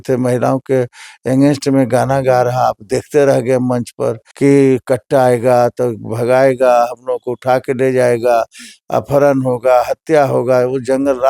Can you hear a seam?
yes; 1 cut; at 4.2 s

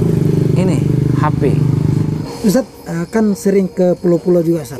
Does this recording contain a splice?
yes; 1 cut; at 2.2 s

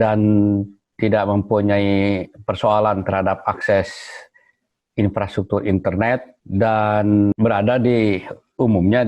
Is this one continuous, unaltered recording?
no; 2 cuts; at 6.4 s, 7.3 s

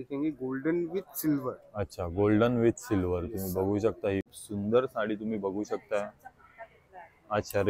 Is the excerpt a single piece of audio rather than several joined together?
no; 1 cut; at 4.3 s

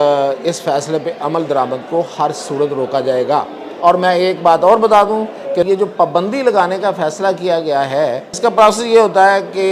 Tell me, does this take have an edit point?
yes; 2 cuts; at 5.7 s, 8.3 s

